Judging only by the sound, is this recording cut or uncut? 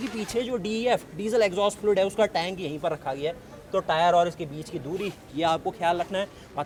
uncut